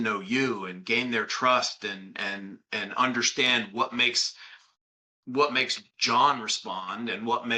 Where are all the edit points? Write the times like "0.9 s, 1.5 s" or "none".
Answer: none